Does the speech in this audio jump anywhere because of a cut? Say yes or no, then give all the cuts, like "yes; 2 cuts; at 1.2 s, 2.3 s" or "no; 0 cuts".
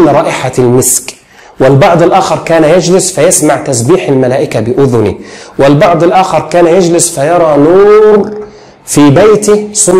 no; 0 cuts